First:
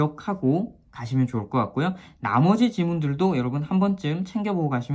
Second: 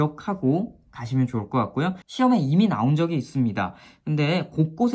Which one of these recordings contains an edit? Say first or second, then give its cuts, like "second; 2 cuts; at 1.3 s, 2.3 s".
second; 1 cut; at 2.0 s